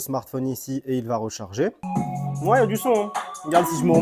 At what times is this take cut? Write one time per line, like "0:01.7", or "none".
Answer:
0:01.8